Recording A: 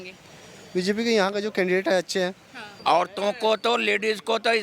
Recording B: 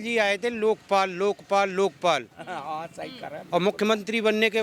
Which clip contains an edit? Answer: A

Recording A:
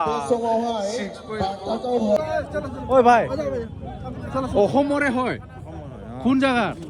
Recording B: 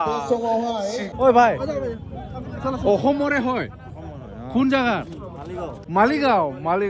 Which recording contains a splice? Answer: B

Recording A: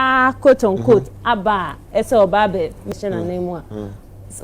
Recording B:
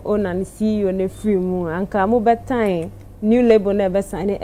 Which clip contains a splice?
A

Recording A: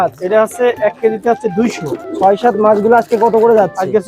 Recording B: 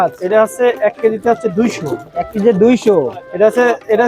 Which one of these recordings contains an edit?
A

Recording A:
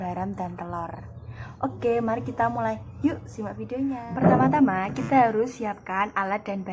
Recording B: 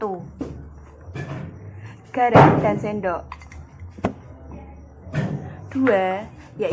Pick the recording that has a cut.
A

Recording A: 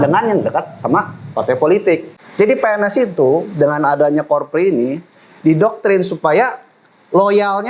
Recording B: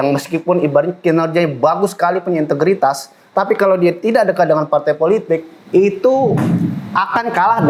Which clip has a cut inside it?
A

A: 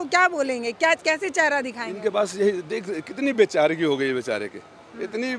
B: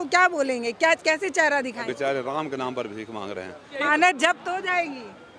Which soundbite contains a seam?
B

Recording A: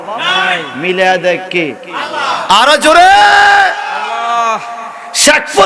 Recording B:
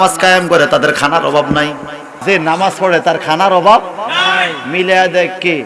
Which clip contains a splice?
B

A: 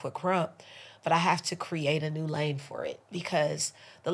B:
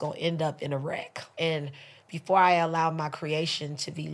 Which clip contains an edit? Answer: B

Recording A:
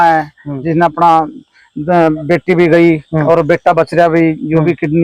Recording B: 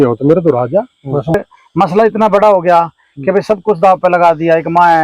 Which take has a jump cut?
B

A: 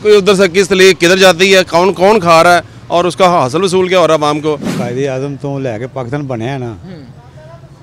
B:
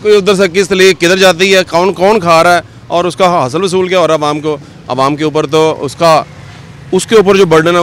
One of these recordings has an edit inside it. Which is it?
A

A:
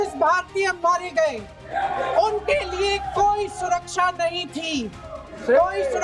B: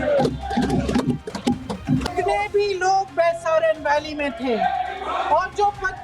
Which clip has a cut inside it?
B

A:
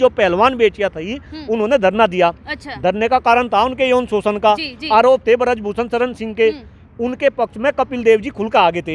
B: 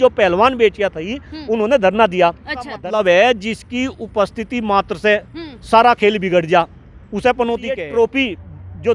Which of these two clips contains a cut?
B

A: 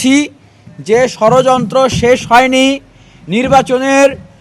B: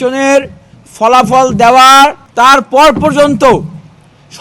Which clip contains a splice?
B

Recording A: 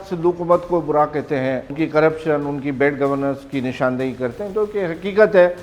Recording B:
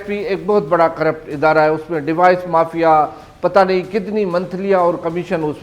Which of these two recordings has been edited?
A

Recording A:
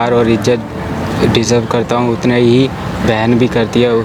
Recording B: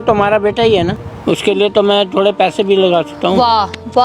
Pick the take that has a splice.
B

